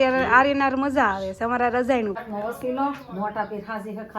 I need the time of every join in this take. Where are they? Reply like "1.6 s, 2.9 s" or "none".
2.2 s